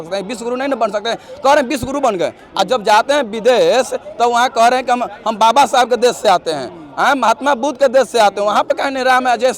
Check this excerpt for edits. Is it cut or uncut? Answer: uncut